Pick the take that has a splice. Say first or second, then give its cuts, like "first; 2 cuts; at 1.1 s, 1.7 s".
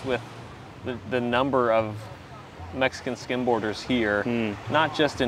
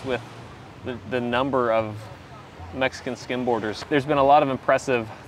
second; 1 cut; at 3.7 s